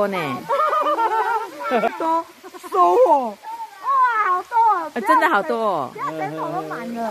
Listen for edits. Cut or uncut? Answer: cut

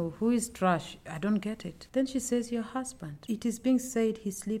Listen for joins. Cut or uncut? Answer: cut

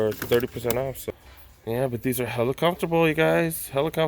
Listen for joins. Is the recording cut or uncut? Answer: cut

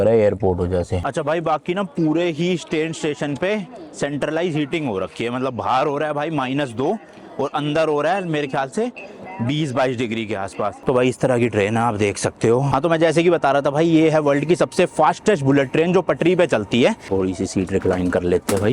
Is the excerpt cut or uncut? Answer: cut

